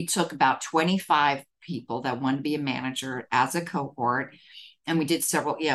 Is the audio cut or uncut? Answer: uncut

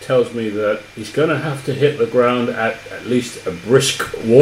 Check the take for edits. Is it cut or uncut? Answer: cut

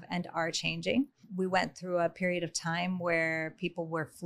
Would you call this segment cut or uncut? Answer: cut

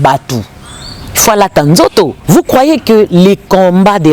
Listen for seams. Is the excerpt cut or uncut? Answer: cut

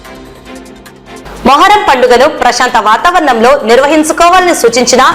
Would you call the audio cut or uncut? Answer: cut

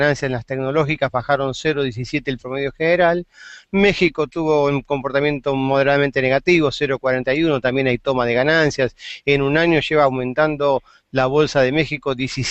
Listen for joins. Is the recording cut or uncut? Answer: cut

